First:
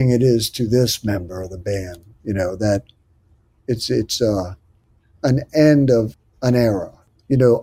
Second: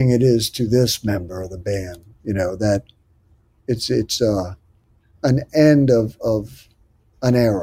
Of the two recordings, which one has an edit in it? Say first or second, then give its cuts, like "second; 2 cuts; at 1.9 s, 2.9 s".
first; 1 cut; at 6.1 s